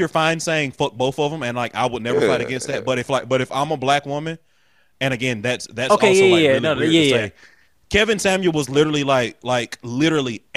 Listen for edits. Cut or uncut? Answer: uncut